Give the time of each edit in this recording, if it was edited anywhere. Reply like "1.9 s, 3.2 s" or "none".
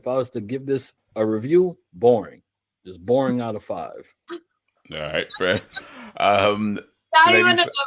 1.0 s